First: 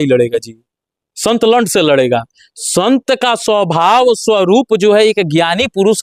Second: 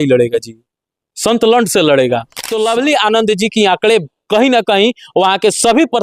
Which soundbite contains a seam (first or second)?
second